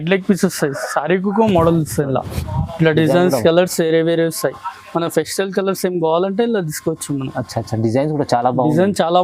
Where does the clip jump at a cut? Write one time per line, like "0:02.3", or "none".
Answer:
none